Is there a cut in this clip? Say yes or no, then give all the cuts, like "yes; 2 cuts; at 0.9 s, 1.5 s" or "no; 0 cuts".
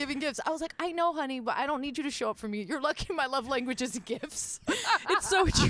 no; 0 cuts